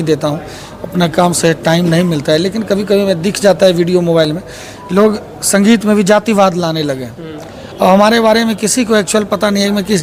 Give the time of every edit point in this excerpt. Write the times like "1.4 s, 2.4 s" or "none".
none